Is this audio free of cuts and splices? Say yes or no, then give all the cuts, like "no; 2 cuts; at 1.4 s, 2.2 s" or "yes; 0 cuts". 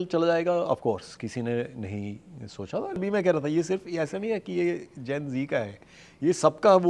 no; 1 cut; at 3.0 s